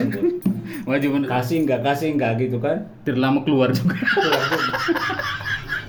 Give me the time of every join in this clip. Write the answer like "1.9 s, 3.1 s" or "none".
none

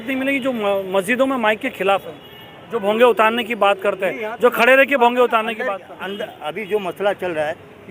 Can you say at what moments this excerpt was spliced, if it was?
none

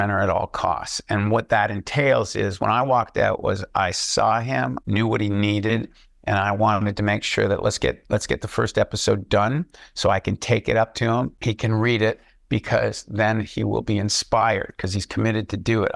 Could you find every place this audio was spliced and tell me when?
4.8 s, 11.4 s

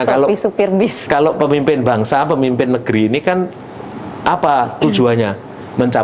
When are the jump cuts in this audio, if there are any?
1.0 s

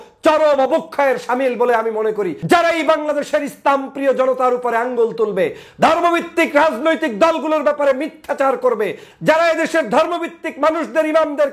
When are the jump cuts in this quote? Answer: 2.4 s

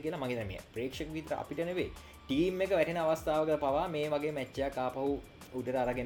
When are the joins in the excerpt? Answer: none

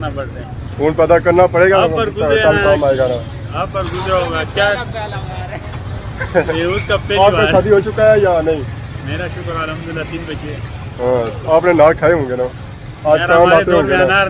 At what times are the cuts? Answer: none

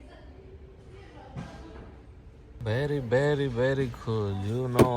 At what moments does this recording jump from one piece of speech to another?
2.6 s

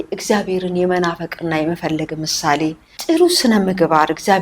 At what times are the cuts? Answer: 2.9 s

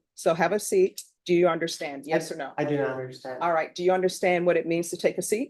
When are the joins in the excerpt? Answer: 1.1 s

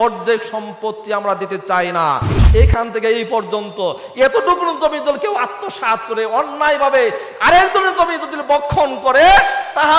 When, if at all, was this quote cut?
2.4 s

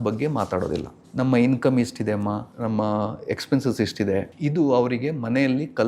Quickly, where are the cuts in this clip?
1.0 s, 2.5 s, 4.3 s

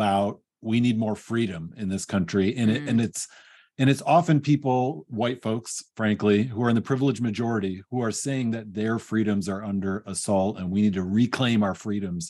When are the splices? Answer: none

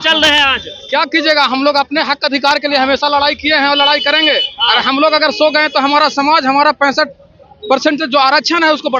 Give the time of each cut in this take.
none

